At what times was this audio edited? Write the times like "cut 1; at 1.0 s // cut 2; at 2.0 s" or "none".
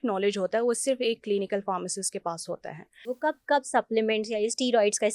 cut 1; at 3.0 s